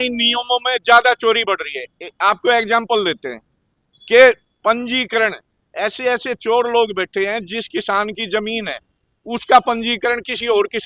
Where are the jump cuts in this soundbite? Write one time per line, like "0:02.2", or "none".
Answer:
none

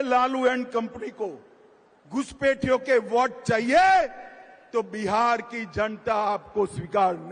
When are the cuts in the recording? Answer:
none

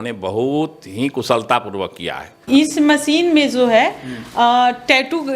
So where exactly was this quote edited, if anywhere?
0:02.3

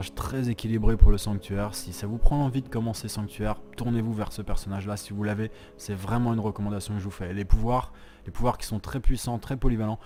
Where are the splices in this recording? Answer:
none

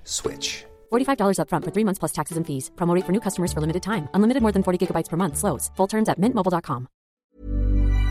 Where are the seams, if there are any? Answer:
0:07.1

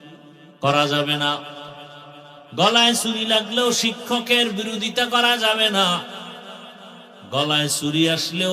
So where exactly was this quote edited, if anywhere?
none

